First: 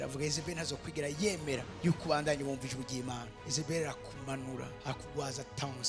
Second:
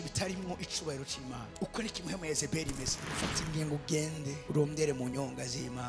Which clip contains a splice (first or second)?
second